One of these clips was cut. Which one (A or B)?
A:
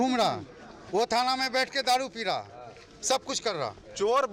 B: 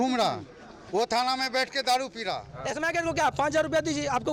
B